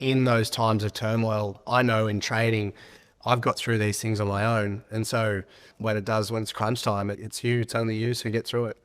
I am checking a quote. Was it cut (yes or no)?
yes